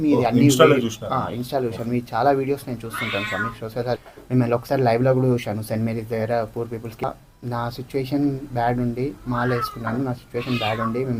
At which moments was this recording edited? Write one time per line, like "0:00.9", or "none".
0:04.1
0:07.0